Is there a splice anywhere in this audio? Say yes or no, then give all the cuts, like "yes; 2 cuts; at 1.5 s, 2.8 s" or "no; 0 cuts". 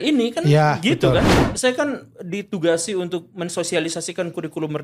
yes; 1 cut; at 1.3 s